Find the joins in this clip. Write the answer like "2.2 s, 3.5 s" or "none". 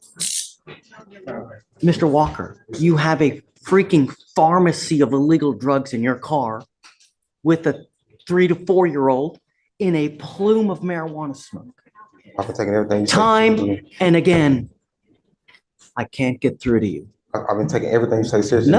none